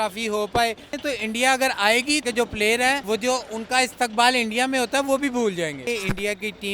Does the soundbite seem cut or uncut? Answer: cut